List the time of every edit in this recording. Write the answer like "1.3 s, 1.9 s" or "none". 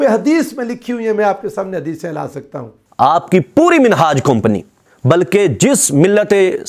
2.8 s

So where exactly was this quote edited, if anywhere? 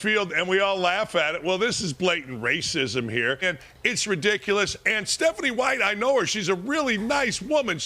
3.4 s

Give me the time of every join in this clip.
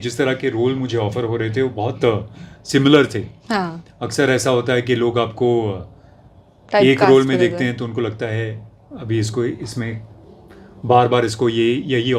none

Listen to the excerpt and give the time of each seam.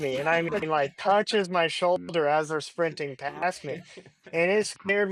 none

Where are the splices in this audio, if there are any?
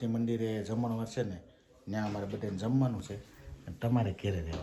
none

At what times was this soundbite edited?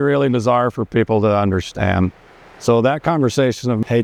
none

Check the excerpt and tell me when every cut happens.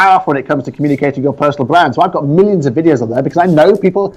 none

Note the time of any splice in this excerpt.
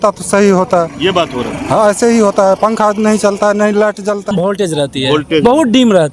4.3 s

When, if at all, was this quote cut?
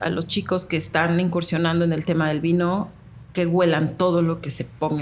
none

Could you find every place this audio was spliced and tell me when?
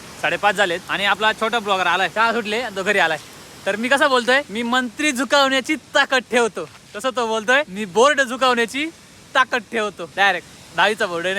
0.9 s, 2.1 s, 4.5 s, 7.8 s, 10.0 s

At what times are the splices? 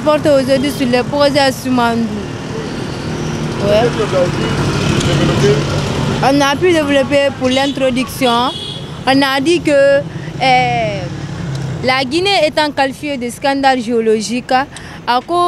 none

